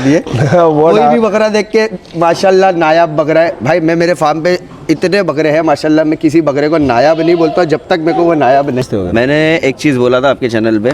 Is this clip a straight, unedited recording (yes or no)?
no